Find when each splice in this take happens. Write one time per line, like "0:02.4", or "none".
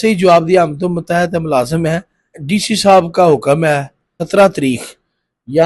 0:02.4
0:04.1